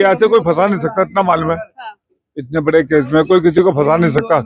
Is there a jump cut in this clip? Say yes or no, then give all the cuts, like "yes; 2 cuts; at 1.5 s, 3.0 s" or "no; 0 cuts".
no; 0 cuts